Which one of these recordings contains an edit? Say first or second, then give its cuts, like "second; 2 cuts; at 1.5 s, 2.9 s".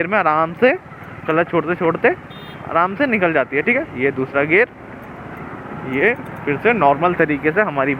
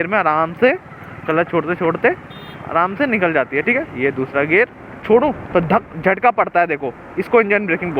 second; 1 cut; at 5.0 s